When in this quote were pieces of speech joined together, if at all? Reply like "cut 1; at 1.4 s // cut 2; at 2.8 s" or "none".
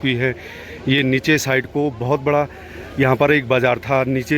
none